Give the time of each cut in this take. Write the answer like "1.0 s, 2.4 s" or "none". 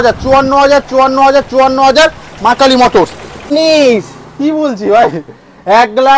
3.5 s